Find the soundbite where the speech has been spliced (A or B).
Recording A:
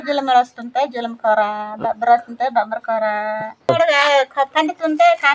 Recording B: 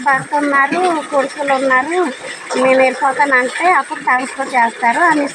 A